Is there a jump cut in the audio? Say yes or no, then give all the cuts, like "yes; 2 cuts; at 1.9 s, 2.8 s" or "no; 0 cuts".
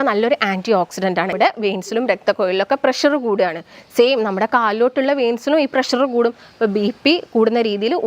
yes; 1 cut; at 1.3 s